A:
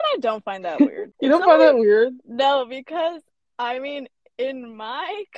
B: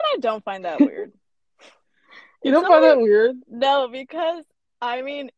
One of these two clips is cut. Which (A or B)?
A